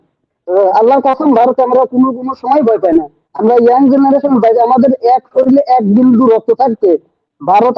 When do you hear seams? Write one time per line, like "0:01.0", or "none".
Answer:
none